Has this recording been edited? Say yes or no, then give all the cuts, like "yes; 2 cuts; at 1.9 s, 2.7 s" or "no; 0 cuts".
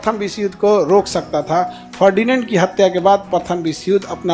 no; 0 cuts